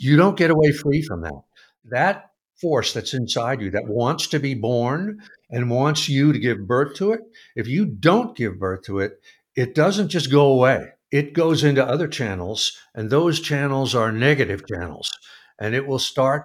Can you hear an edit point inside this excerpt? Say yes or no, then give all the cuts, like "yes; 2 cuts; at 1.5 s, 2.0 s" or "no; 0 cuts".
yes; 2 cuts; at 1.8 s, 10.9 s